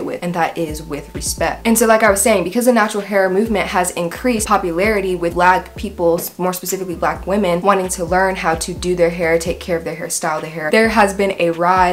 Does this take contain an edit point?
no; 0 cuts

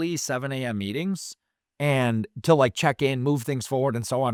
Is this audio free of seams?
yes; 0 cuts

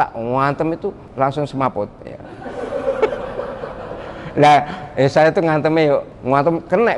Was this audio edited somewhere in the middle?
yes; 2 cuts; at 1.0 s, 6.1 s

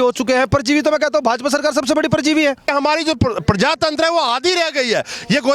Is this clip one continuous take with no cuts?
no; 1 cut; at 2.6 s

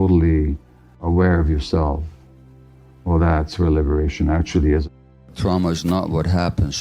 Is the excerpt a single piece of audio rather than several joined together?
no; 1 cut; at 4.8 s

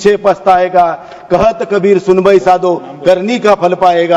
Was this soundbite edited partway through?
no; 0 cuts

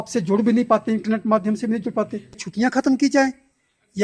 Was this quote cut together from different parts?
yes; 1 cut; at 2.4 s

